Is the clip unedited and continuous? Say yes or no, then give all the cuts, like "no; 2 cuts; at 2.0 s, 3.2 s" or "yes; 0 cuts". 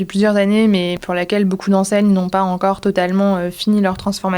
no; 1 cut; at 1.0 s